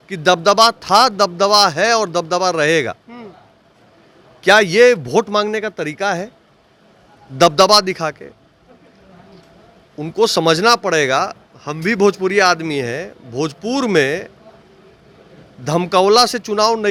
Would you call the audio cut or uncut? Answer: uncut